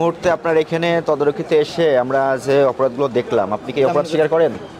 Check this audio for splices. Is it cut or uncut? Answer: uncut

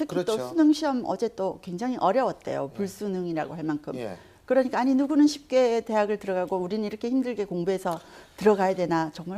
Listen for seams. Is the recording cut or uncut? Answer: cut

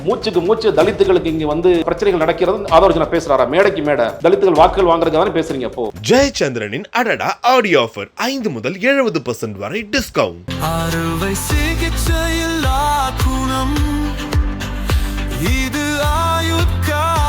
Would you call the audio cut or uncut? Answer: cut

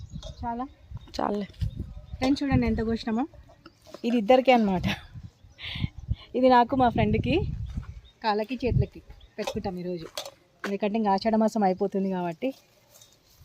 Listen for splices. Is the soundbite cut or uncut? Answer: uncut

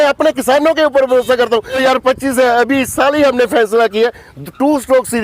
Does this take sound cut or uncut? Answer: cut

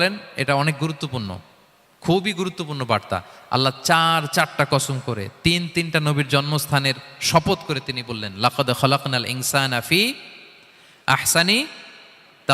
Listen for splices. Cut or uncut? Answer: cut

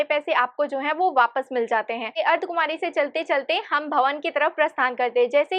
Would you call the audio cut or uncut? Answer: uncut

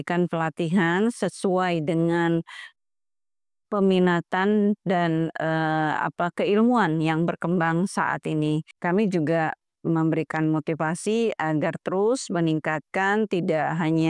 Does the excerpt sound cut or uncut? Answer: cut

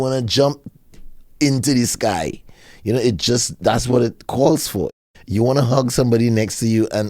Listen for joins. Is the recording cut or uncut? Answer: cut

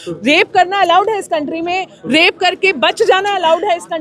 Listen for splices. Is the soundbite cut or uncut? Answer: uncut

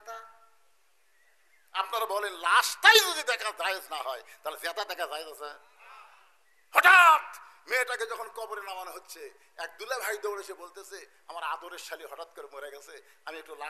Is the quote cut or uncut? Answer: uncut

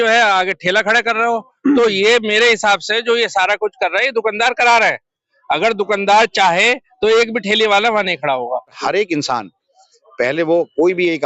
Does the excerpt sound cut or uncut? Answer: cut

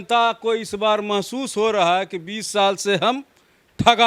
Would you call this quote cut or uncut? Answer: uncut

